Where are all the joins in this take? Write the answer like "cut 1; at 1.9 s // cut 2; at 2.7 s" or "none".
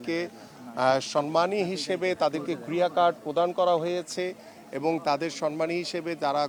none